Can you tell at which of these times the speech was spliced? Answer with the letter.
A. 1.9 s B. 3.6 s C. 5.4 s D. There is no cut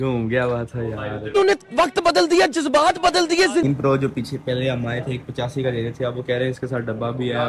B